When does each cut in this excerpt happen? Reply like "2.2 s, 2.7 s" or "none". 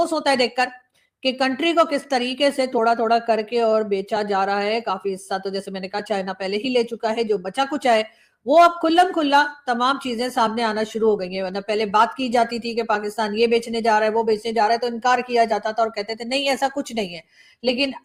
none